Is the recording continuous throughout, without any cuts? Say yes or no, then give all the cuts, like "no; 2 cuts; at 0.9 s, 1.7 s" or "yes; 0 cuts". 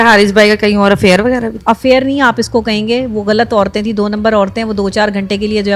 yes; 0 cuts